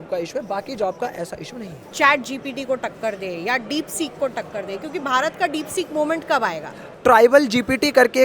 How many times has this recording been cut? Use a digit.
2